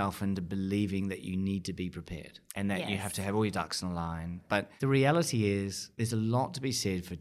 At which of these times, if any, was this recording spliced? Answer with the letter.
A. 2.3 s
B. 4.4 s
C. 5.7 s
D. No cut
B